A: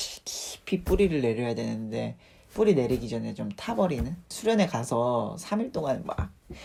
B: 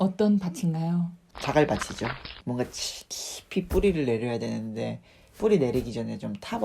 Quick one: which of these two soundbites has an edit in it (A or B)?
B